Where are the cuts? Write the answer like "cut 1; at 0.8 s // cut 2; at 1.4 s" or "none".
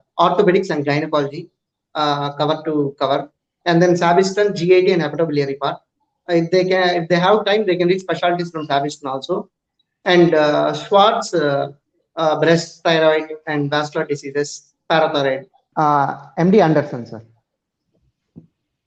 cut 1; at 15.6 s